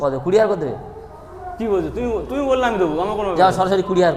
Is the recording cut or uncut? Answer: uncut